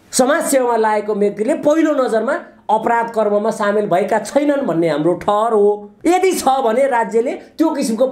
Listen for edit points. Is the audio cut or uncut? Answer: cut